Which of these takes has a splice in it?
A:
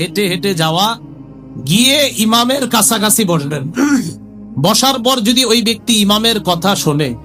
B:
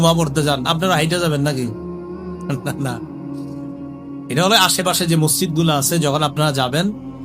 B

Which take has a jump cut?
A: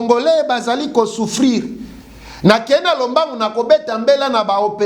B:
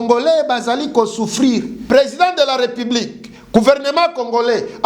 B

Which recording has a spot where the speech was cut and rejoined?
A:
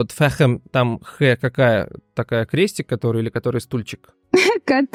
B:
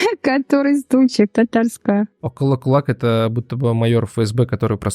B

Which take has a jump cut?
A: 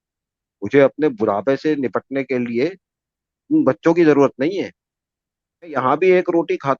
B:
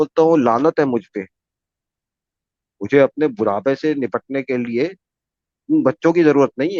A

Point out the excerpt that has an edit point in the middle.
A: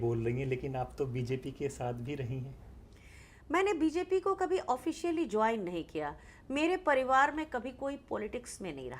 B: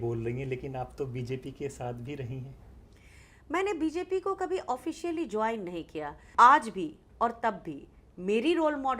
B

